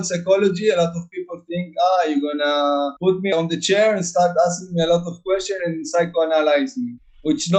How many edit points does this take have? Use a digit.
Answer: 0